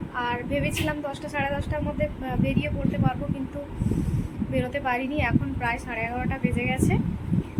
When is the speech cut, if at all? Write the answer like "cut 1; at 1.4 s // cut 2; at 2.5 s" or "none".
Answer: none